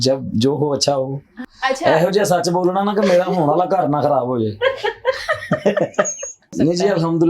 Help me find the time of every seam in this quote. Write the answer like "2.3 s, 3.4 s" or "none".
1.4 s, 6.5 s